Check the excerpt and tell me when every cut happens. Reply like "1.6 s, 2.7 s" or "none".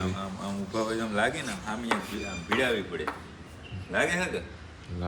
none